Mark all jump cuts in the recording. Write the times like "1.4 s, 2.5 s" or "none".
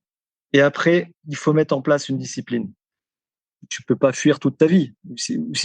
3.3 s